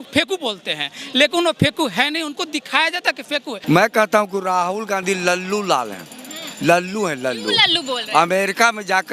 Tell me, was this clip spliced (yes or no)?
yes